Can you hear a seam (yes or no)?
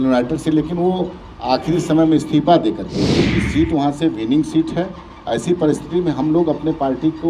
yes